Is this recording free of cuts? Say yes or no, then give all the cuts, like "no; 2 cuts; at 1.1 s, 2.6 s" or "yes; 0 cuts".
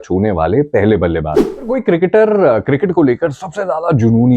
no; 1 cut; at 1.7 s